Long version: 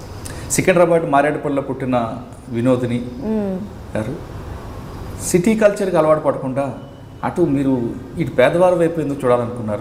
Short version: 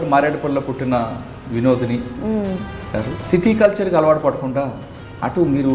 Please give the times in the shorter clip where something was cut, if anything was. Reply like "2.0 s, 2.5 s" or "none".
3.2 s